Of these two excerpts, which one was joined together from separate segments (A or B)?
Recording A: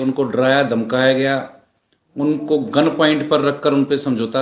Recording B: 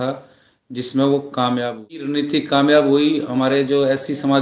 B